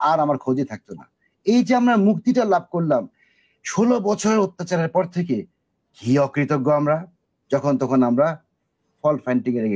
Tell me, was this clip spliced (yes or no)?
no